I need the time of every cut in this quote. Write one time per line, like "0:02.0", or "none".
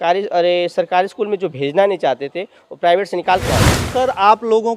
0:03.8